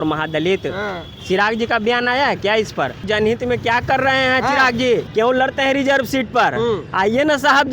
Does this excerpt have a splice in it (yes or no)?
yes